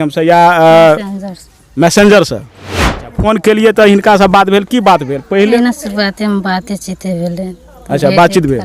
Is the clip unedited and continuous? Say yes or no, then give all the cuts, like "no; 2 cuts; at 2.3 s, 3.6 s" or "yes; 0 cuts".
no; 2 cuts; at 2.9 s, 5.6 s